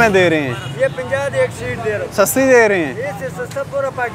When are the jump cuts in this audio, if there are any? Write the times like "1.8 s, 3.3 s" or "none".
none